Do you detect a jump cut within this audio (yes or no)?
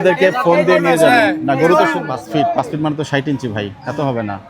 yes